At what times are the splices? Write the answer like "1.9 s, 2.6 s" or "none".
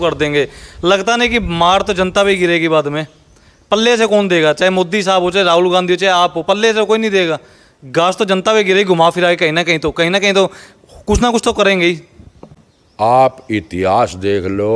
none